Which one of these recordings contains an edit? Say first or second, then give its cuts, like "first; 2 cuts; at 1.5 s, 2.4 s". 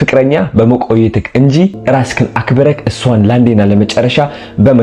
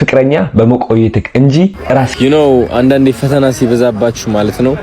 second; 1 cut; at 1.8 s